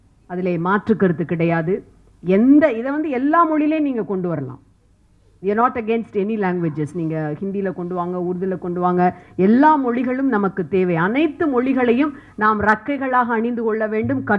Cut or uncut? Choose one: uncut